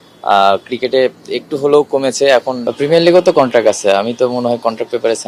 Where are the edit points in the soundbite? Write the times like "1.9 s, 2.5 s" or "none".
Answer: 2.6 s

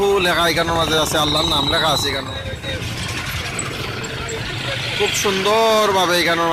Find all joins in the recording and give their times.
2.2 s

